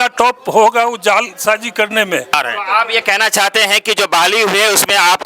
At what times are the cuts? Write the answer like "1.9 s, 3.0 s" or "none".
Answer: 2.3 s